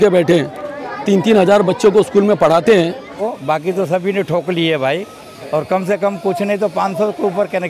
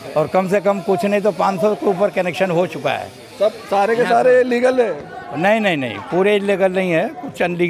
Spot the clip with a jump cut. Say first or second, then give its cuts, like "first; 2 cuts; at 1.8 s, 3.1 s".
first; 1 cut; at 3.1 s